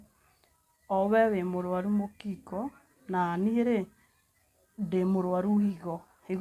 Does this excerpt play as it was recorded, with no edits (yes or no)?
yes